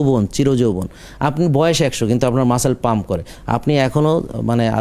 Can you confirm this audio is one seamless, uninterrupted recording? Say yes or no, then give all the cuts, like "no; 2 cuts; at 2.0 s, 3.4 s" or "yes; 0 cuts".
yes; 0 cuts